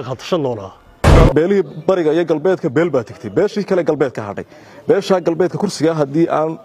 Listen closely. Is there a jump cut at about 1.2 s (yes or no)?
yes